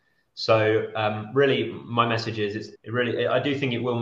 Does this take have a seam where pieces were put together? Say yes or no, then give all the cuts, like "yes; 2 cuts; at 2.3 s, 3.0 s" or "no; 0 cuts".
yes; 1 cut; at 2.7 s